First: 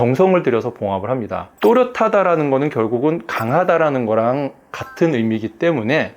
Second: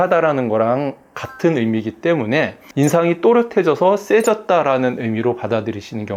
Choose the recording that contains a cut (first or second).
first